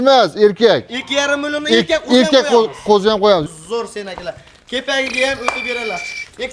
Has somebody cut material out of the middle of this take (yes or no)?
yes